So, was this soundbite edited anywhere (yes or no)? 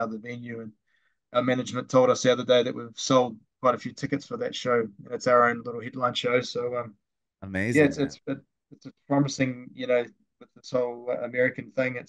no